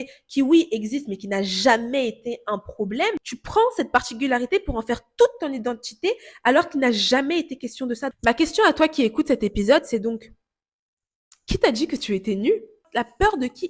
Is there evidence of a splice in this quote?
yes; 3 cuts; at 3.3 s, 8.1 s, 12.8 s

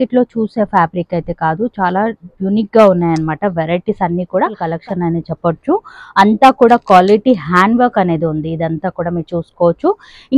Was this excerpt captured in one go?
no; 1 cut; at 4.7 s

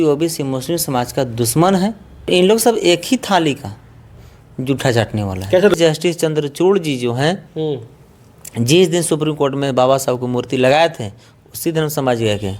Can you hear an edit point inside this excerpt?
yes; 2 cuts; at 2.3 s, 5.7 s

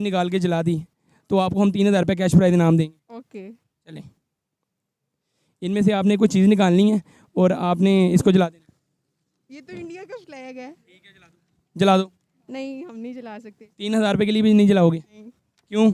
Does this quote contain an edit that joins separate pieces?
no; 0 cuts

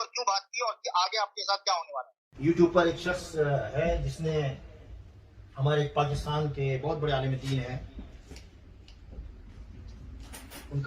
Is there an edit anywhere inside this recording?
yes; 1 cut; at 2.3 s

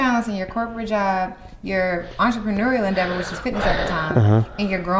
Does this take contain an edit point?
no; 0 cuts

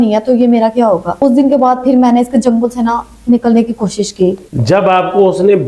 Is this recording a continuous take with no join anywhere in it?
yes; 0 cuts

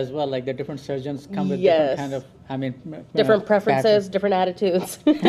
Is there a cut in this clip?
no; 0 cuts

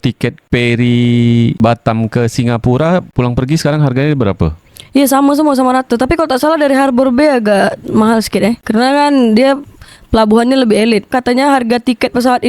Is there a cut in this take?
yes; 2 cuts; at 4.6 s, 11.1 s

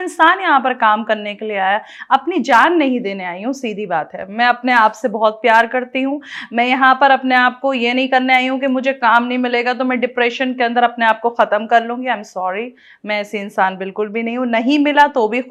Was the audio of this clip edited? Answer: no; 0 cuts

